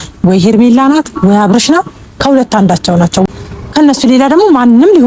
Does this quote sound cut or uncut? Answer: cut